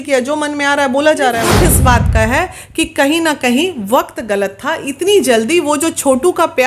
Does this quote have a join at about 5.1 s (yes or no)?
no